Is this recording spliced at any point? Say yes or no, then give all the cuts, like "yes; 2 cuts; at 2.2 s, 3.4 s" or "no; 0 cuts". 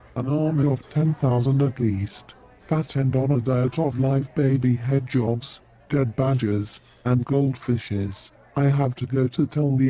no; 0 cuts